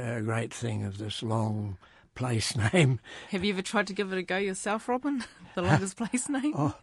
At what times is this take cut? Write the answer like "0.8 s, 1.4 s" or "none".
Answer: none